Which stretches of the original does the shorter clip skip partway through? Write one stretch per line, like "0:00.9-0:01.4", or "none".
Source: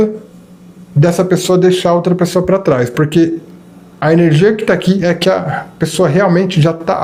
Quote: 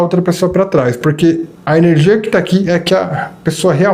0:03.5-0:03.9